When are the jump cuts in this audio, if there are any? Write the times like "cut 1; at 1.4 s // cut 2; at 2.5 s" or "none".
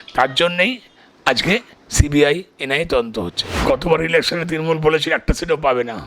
cut 1; at 3.5 s